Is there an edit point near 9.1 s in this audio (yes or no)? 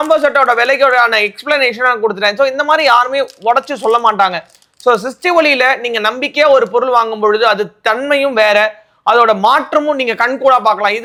no